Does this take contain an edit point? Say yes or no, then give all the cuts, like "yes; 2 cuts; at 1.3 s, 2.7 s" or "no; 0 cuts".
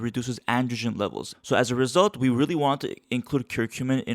yes; 1 cut; at 1.3 s